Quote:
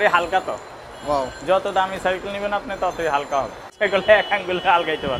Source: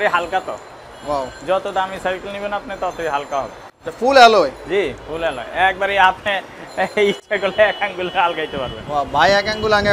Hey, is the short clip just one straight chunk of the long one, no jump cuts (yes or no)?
no